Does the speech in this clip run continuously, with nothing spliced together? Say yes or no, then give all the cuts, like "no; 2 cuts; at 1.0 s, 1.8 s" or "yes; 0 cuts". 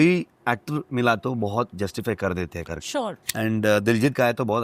no; 1 cut; at 3.2 s